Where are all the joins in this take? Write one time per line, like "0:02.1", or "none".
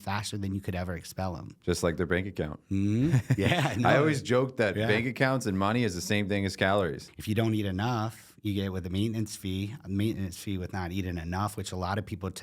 0:07.0